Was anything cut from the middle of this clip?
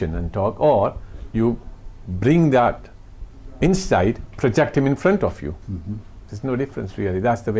no; 0 cuts

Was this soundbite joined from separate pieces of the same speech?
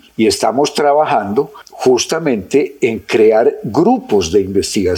no; 0 cuts

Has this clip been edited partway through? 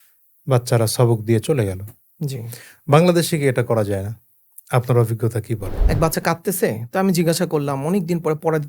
yes; 1 cut; at 5.7 s

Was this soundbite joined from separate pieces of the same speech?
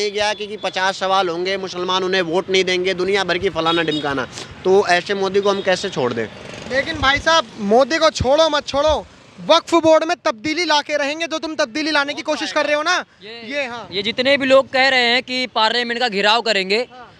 no; 0 cuts

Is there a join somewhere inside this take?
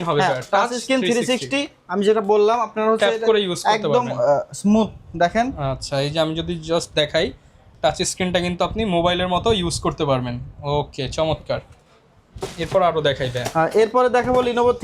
no; 0 cuts

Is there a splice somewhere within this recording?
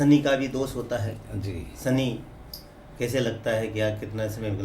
no; 0 cuts

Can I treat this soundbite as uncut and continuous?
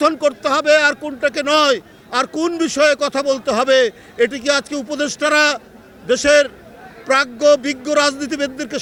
yes; 0 cuts

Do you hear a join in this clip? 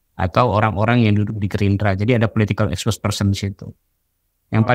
no; 0 cuts

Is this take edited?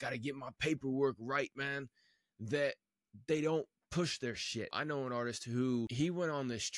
yes; 2 cuts; at 4.8 s, 5.9 s

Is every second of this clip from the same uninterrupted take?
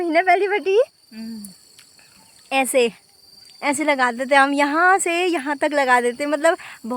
yes; 0 cuts

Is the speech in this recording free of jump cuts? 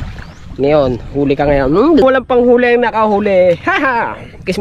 no; 1 cut; at 2.0 s

